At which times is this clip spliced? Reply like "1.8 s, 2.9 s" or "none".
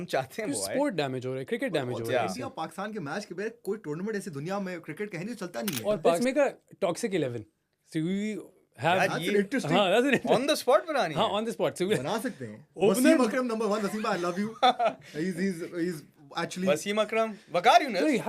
6.2 s